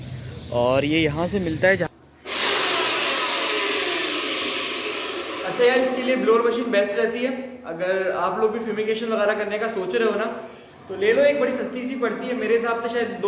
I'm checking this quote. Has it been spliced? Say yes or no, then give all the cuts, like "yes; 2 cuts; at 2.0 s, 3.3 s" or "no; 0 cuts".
yes; 1 cut; at 1.9 s